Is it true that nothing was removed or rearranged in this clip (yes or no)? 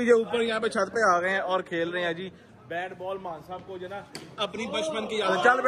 yes